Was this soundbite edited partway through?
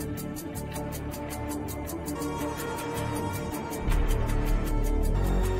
no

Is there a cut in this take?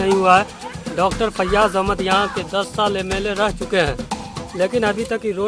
no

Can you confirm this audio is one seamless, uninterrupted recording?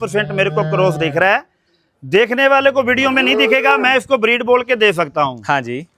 yes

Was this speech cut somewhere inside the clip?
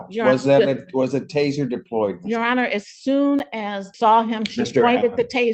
yes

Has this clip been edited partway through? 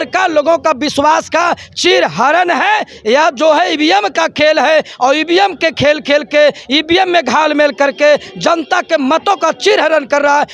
no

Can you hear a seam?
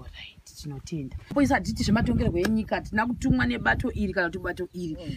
yes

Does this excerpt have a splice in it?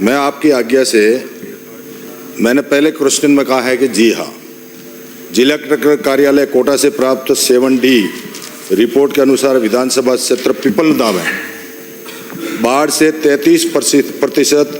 no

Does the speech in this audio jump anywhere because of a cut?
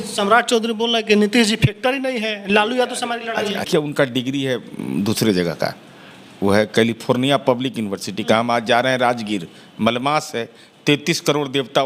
yes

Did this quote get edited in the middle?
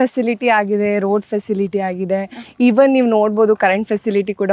no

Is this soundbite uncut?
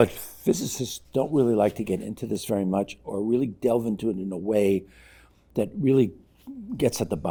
yes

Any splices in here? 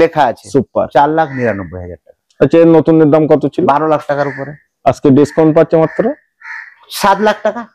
no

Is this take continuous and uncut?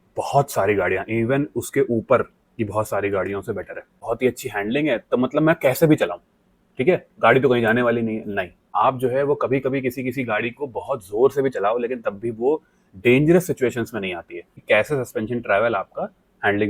no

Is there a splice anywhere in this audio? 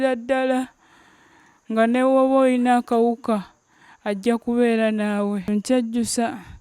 yes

